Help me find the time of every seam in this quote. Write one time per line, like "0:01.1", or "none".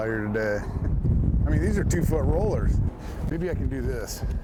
none